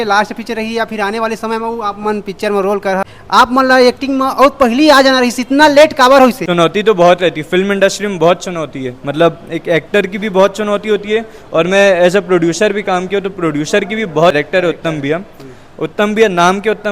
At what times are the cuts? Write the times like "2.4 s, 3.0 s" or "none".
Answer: 3.1 s, 6.4 s, 14.4 s